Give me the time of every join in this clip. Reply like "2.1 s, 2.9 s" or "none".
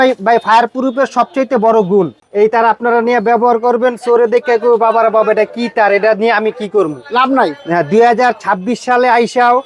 2.2 s